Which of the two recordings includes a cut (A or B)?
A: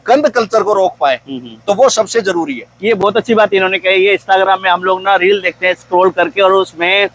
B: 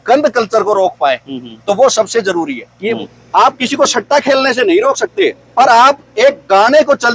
B